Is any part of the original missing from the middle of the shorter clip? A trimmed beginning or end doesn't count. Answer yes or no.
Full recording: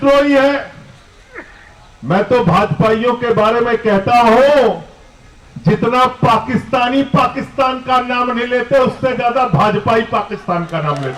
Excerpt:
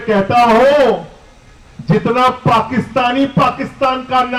no